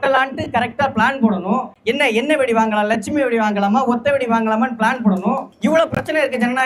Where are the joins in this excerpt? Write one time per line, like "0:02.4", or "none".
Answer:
0:01.7
0:05.5